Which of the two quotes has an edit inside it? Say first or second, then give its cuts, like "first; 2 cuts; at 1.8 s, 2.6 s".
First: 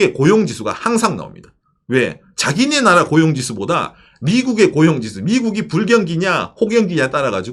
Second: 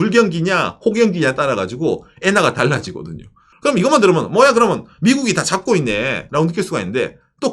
second; 1 cut; at 6.2 s